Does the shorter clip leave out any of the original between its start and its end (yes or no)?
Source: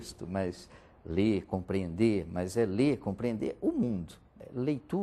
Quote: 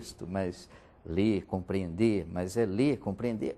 no